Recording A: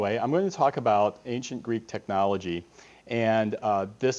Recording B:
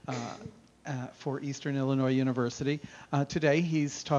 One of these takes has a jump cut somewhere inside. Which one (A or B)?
B